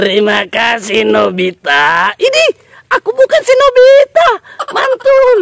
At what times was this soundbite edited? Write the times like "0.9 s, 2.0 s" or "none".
none